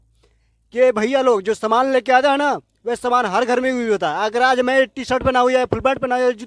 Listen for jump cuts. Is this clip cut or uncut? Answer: uncut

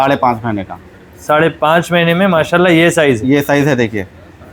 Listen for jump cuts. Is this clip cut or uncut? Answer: uncut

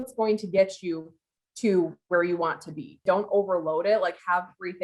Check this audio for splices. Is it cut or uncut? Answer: cut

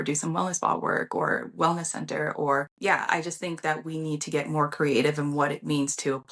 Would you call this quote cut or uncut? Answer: cut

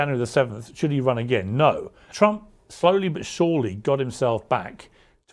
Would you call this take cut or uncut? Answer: cut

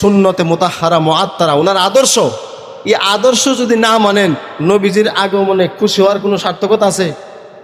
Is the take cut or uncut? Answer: uncut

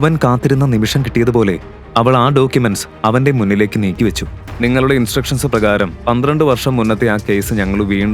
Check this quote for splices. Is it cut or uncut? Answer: cut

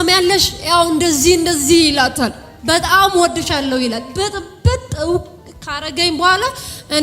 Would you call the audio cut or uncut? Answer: cut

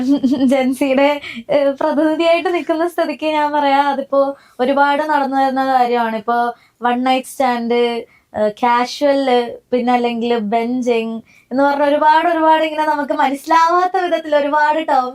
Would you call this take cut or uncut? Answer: uncut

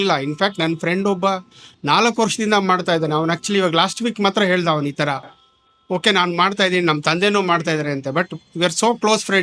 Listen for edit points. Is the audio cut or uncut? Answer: uncut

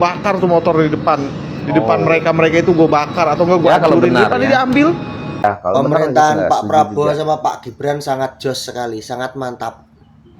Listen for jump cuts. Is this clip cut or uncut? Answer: cut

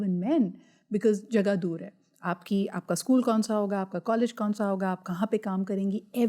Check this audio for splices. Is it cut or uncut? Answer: uncut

